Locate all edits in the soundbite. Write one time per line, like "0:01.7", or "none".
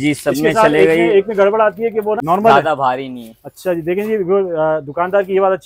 0:02.2